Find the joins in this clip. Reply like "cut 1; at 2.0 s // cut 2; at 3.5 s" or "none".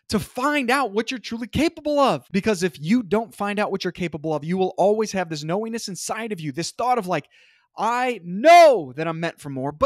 cut 1; at 2.2 s